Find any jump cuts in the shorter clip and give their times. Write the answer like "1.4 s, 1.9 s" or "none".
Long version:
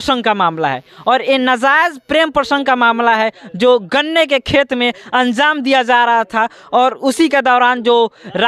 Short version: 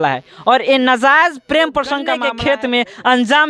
2.1 s